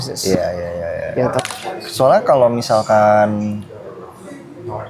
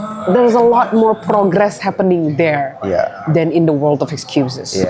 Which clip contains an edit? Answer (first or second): first